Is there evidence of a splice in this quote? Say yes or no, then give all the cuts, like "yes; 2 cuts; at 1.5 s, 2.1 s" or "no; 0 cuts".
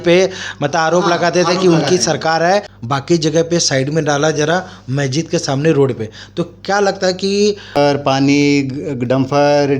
yes; 2 cuts; at 2.7 s, 7.8 s